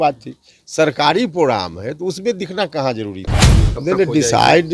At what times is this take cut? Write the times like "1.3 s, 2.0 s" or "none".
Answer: 3.5 s

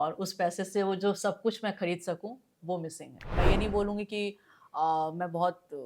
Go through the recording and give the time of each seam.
3.3 s

